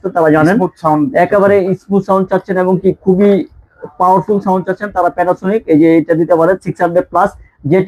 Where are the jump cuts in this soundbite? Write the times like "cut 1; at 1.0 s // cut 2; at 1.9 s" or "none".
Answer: none